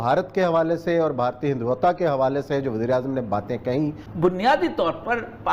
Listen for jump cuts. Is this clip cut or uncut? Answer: cut